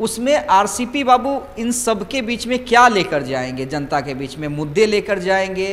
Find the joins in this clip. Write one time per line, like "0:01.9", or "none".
none